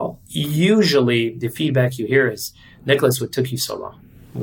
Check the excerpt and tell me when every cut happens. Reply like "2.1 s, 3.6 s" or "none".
1.4 s